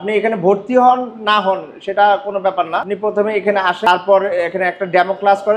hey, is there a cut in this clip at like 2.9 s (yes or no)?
yes